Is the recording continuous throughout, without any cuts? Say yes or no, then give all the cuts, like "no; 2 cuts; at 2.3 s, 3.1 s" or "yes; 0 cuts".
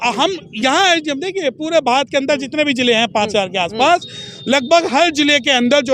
yes; 0 cuts